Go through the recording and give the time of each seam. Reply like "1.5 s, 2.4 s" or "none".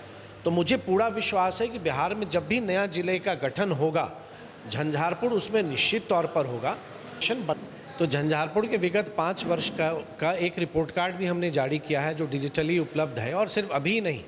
7.2 s